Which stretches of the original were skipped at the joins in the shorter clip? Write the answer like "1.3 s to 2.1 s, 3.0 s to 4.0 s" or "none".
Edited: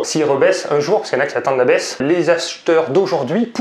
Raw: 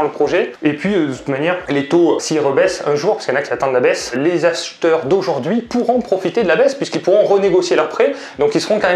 none